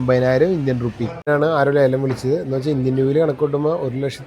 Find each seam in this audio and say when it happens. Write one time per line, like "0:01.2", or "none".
0:01.3